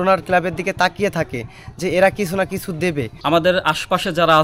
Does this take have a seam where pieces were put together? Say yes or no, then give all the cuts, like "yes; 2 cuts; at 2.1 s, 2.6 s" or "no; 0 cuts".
yes; 1 cut; at 3.1 s